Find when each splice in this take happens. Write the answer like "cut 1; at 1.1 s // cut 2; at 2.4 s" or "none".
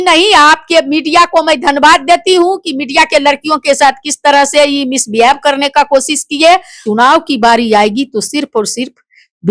cut 1; at 6.8 s